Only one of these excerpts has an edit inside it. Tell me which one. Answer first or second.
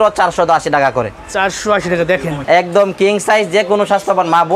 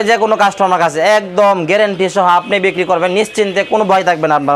first